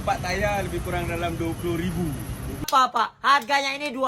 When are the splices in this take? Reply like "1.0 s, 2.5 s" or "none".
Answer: 2.6 s